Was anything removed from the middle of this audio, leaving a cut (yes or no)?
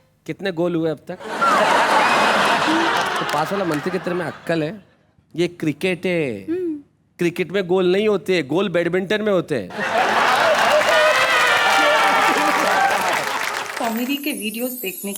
yes